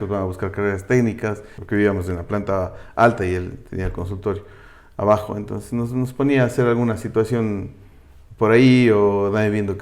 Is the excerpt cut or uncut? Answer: cut